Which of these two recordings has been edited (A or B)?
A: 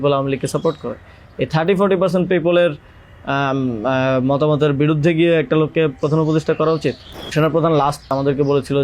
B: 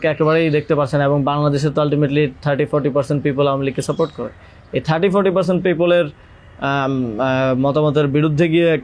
A